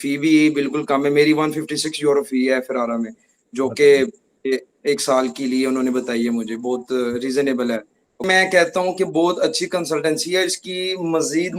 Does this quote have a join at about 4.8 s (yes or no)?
no